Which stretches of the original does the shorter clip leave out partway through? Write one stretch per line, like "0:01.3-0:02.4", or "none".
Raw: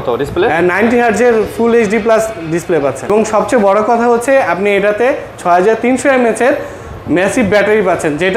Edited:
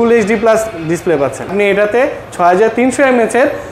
0:03.1-0:04.5